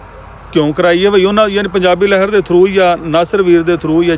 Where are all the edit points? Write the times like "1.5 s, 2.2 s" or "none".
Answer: none